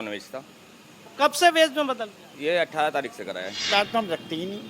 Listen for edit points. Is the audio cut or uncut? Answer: cut